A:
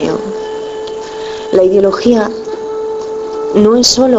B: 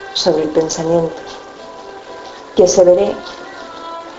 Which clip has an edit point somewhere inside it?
B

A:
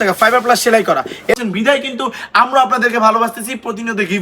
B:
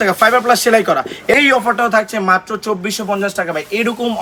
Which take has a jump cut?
A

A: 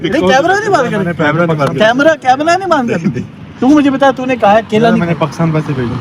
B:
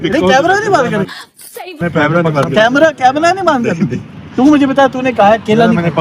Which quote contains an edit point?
A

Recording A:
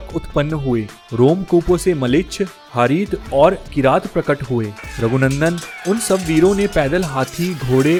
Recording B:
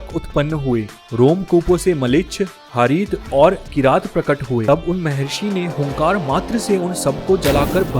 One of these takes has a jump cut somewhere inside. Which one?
B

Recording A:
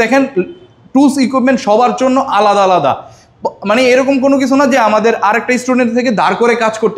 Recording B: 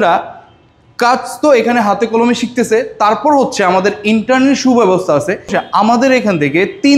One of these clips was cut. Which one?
B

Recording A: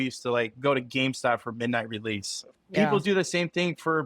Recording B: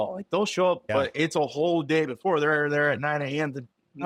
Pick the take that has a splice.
A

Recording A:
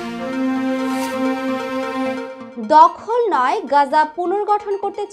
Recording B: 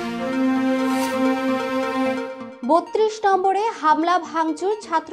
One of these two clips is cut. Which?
A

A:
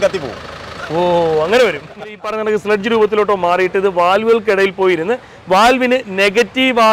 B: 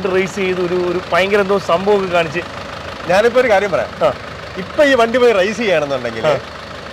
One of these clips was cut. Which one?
A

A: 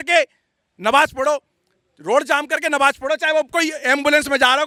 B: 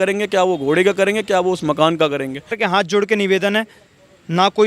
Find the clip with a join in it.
B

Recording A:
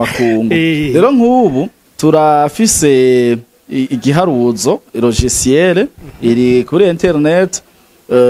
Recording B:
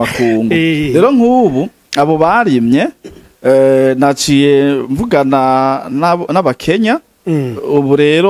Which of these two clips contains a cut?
A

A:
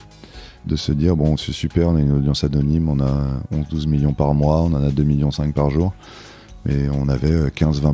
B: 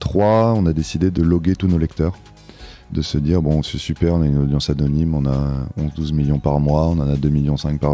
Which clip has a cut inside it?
B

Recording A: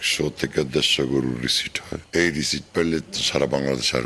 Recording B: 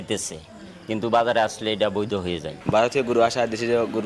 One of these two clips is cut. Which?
B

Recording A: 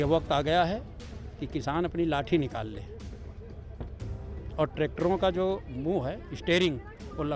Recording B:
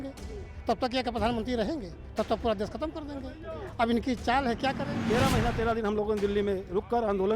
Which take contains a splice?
B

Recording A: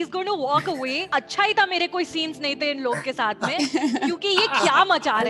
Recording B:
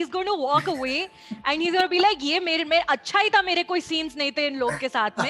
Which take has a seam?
A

